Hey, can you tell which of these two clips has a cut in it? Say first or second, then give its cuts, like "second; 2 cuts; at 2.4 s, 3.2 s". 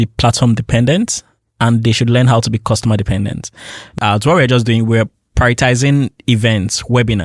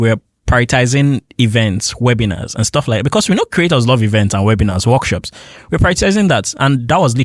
first; 1 cut; at 4.0 s